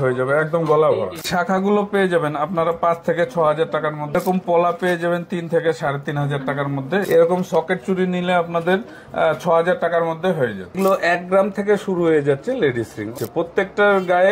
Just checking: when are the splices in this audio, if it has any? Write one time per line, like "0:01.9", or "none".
0:01.2
0:04.2
0:07.0
0:10.7
0:13.1